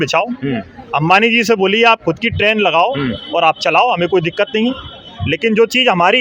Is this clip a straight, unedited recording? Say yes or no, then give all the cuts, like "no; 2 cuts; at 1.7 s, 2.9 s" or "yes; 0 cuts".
yes; 0 cuts